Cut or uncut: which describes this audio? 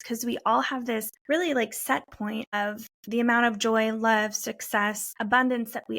cut